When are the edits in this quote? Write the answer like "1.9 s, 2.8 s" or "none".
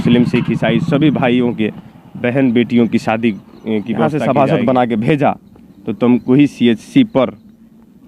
4.1 s